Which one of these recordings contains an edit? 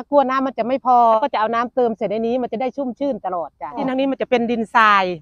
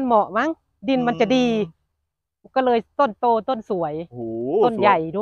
first; 2 cuts; at 1.2 s, 3.8 s

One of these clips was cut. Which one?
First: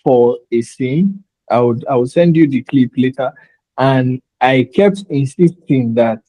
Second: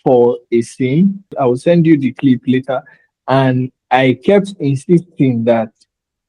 second; 1 cut; at 1.3 s

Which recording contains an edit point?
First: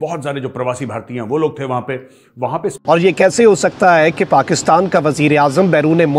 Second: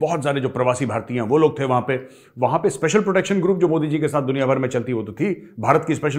first; 1 cut; at 2.7 s

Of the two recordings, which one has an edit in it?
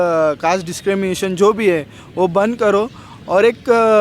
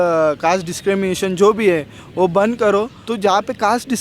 second; 1 cut; at 3.0 s

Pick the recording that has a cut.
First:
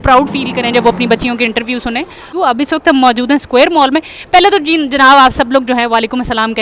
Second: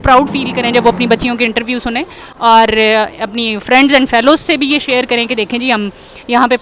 first; 1 cut; at 2.3 s

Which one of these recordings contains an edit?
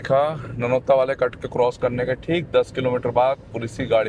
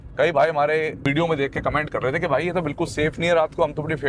second; 1 cut; at 1.0 s

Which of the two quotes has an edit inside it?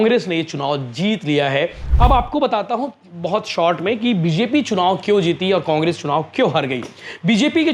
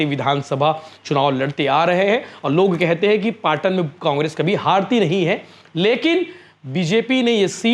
first; 1 cut; at 1.8 s

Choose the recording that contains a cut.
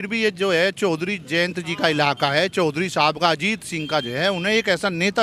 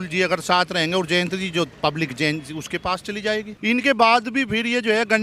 second; 1 cut; at 3.5 s

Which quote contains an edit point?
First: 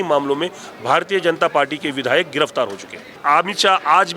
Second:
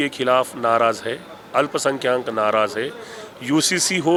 first; 1 cut; at 3.2 s

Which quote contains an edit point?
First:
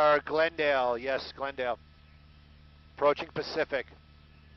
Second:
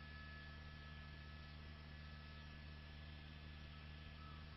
first; 1 cut; at 3.6 s

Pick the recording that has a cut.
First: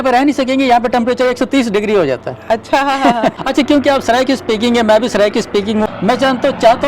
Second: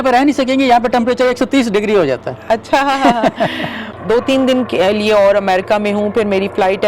first; 2 cuts; at 3.4 s, 5.9 s

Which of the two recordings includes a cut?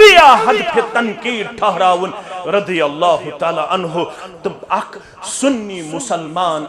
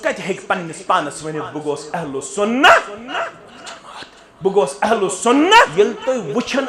second; 1 cut; at 5.7 s

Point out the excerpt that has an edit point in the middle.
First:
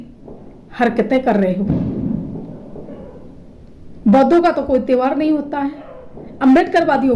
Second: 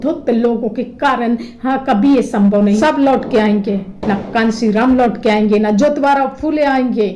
second; 1 cut; at 2.8 s

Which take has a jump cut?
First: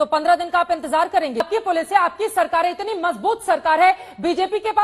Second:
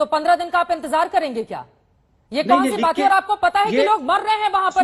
first; 1 cut; at 1.5 s

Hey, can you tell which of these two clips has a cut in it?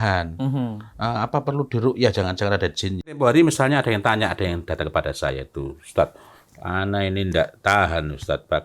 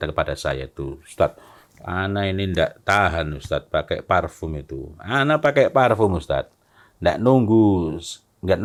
first; 1 cut; at 3.2 s

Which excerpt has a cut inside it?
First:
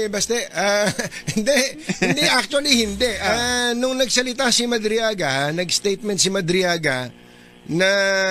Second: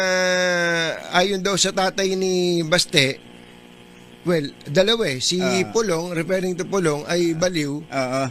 second; 1 cut; at 3.6 s

